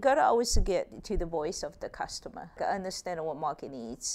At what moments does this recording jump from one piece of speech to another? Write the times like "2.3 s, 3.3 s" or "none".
1.0 s, 2.6 s